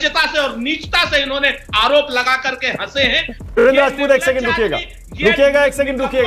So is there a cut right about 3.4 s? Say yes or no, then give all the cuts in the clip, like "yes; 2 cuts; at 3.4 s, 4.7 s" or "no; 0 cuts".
yes; 1 cut; at 3.4 s